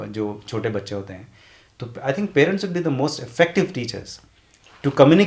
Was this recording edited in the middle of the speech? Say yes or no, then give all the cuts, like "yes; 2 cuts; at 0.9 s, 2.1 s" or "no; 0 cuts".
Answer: no; 0 cuts